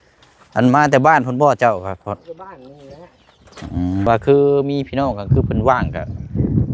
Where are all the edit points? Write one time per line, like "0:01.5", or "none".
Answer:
0:04.1